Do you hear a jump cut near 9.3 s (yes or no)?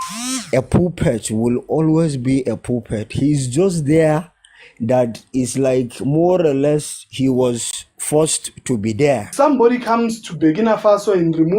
yes